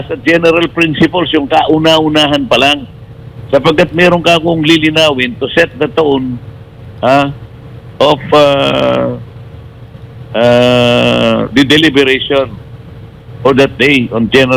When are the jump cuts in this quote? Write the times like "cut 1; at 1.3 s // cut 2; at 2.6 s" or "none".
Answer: none